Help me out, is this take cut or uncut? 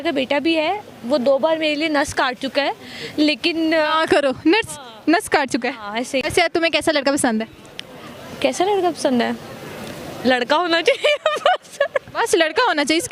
uncut